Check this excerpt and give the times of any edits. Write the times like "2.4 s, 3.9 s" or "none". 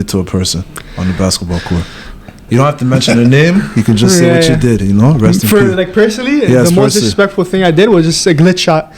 none